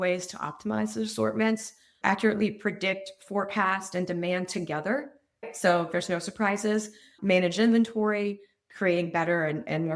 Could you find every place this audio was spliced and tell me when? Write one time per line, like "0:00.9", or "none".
0:05.4